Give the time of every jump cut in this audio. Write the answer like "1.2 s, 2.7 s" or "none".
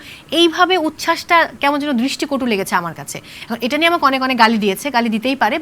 none